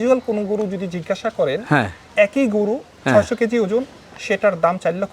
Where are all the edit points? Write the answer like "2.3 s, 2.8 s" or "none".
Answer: 2.1 s